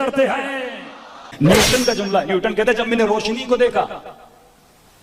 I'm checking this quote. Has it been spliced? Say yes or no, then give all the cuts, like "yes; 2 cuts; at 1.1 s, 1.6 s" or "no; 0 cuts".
yes; 1 cut; at 1.2 s